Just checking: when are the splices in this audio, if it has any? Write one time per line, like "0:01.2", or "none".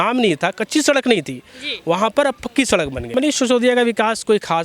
0:03.0